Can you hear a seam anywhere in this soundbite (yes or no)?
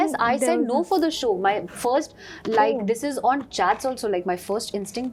no